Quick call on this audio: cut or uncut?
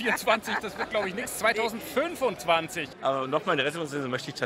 cut